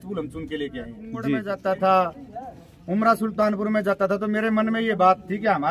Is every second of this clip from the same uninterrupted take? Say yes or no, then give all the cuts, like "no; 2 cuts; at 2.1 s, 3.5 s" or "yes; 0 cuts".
no; 1 cut; at 1.2 s